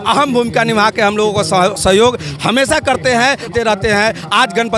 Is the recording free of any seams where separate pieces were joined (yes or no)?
no